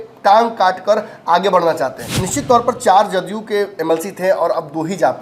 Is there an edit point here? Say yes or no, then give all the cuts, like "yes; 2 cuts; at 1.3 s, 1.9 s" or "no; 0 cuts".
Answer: yes; 1 cut; at 2.1 s